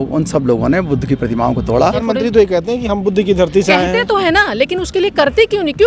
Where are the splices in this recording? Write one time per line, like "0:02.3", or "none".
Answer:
0:02.0